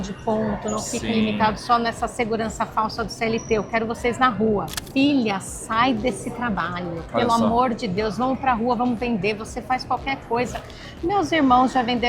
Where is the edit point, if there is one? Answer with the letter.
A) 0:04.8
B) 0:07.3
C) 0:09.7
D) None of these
A